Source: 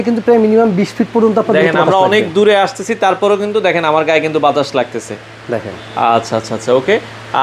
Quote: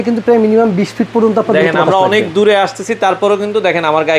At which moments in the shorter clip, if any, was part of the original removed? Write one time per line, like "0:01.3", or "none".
none

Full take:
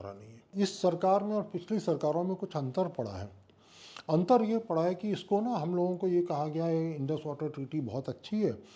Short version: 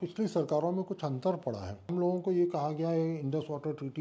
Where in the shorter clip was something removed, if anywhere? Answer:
0:01.9

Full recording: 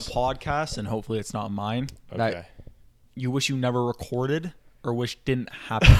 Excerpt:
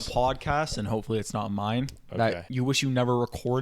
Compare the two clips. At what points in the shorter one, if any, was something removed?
0:02.4

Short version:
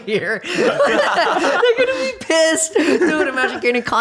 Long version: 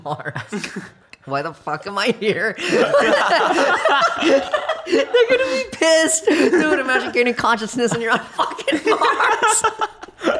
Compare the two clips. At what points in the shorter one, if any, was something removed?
0:01.6

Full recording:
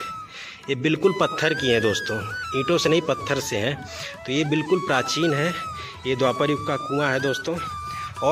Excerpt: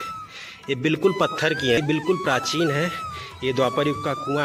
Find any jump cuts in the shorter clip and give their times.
0:01.8

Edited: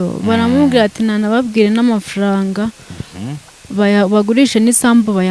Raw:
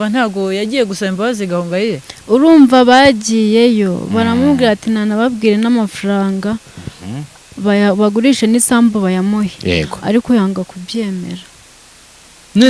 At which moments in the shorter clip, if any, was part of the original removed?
none

